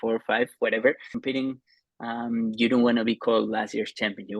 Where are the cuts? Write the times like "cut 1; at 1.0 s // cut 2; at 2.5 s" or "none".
cut 1; at 1.1 s

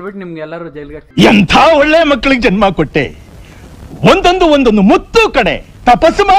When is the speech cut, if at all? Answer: cut 1; at 1.0 s

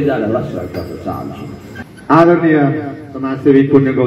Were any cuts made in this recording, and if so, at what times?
cut 1; at 1.9 s

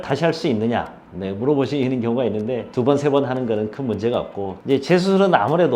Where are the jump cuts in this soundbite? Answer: cut 1; at 2.7 s // cut 2; at 4.6 s

